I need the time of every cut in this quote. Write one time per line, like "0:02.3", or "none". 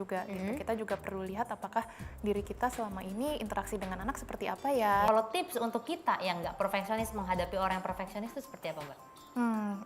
0:05.1

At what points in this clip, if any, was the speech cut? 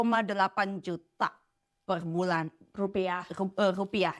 none

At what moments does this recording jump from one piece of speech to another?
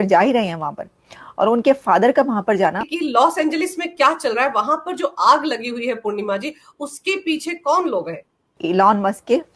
0:02.9
0:08.5

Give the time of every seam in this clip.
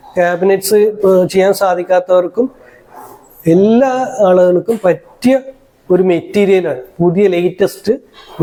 none

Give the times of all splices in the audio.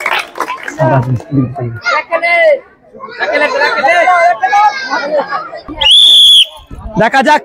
0:05.7

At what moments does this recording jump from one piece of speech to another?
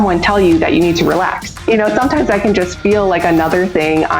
0:01.7

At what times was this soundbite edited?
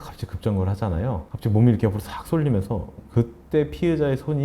0:01.3

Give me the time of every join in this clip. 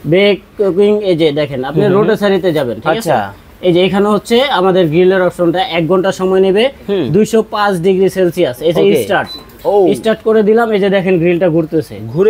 none

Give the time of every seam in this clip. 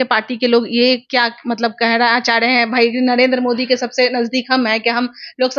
none

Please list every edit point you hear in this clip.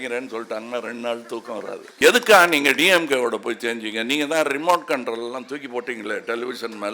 0:01.9

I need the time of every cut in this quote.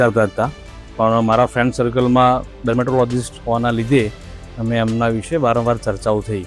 0:02.5

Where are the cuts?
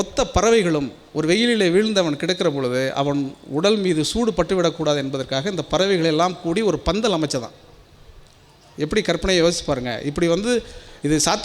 none

